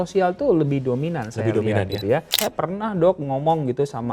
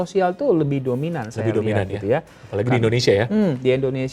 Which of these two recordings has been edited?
first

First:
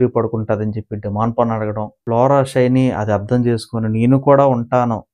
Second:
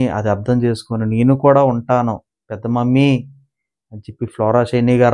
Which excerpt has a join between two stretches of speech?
first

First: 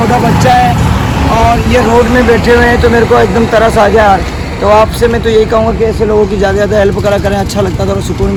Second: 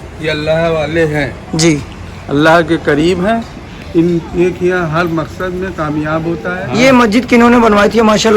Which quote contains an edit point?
second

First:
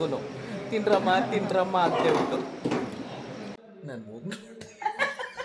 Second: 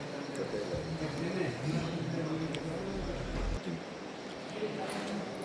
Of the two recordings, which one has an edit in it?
first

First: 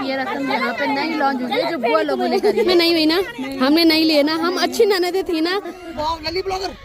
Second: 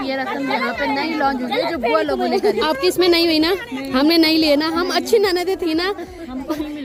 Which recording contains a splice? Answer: first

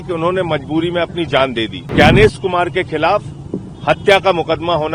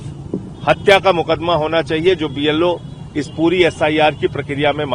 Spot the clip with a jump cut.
first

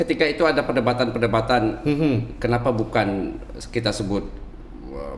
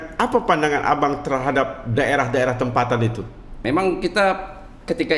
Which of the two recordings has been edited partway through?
second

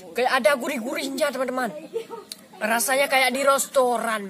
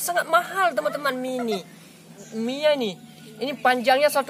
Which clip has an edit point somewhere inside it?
second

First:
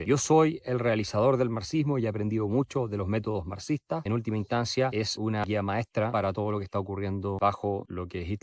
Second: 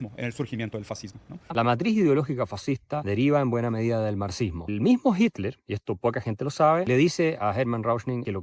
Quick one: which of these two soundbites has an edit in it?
second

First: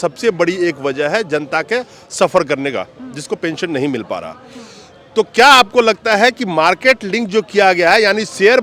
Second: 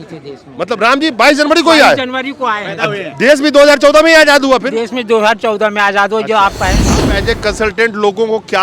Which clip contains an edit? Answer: second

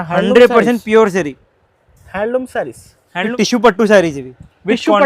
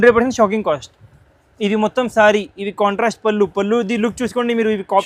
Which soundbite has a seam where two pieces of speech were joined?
first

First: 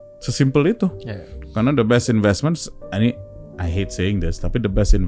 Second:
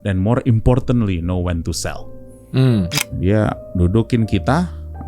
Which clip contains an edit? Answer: second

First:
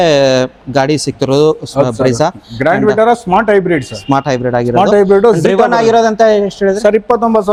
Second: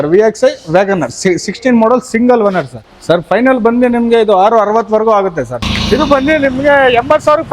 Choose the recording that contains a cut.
second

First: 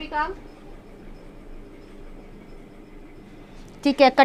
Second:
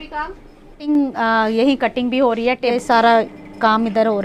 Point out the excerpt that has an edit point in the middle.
second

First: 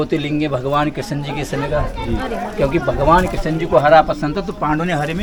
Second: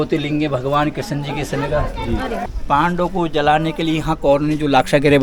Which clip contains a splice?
second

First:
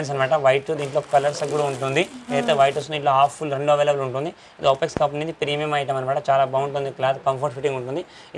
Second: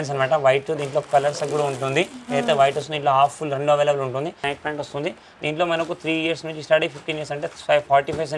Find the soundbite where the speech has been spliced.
second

